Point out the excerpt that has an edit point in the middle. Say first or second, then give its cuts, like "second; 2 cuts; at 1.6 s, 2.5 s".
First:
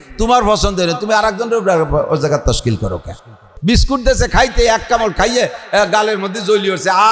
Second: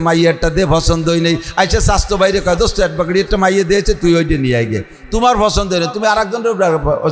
first; 1 cut; at 3.5 s